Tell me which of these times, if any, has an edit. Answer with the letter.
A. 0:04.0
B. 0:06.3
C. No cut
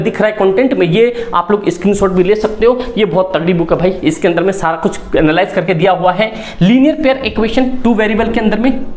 C